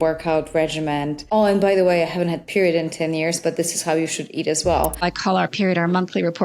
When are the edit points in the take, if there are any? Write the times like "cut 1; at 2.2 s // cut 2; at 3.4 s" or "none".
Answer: cut 1; at 1.2 s // cut 2; at 5.0 s